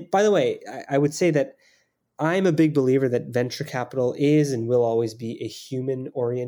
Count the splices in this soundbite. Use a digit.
0